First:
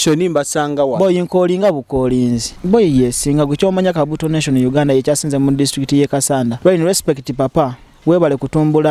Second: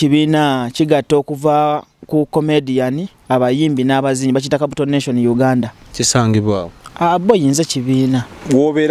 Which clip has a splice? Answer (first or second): first